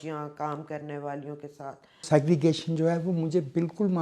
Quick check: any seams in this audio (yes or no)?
yes